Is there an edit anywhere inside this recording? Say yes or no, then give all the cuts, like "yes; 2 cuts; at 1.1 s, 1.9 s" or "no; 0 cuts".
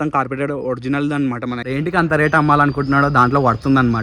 yes; 1 cut; at 1.6 s